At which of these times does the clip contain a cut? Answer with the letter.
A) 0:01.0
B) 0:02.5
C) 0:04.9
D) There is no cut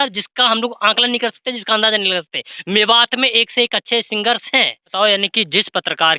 C